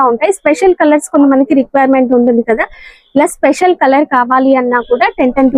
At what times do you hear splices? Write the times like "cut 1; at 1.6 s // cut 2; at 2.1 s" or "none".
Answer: none